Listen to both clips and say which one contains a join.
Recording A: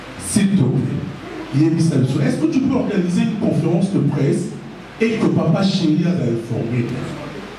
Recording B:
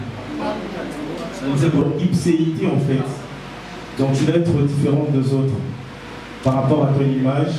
B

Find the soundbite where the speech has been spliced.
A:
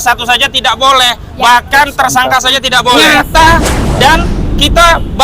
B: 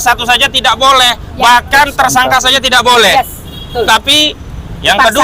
A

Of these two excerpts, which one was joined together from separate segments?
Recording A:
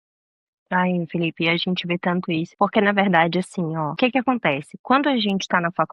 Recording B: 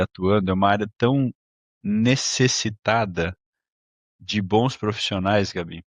A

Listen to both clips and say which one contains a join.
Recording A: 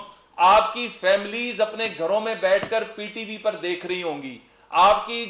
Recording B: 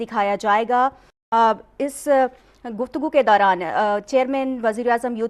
A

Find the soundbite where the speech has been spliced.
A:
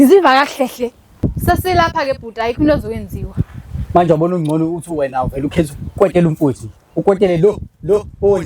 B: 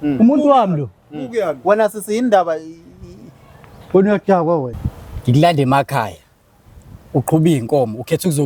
A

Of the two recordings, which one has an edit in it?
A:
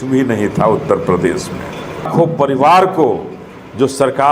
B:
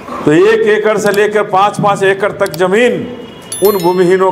A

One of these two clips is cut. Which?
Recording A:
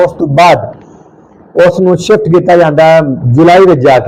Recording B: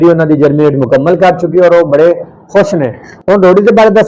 B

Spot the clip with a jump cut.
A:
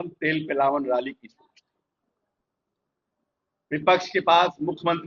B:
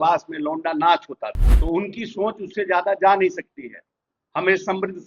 B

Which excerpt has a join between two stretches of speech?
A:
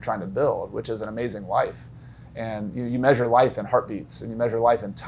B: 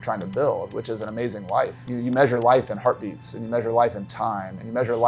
B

